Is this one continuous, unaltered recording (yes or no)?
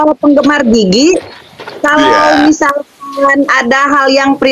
yes